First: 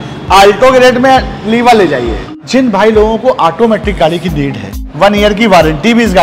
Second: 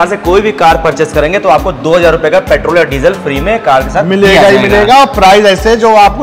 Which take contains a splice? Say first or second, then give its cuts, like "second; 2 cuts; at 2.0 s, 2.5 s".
first; 2 cuts; at 2.3 s, 4.8 s